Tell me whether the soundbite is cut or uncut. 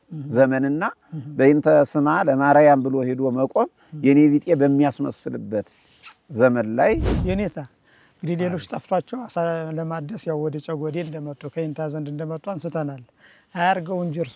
cut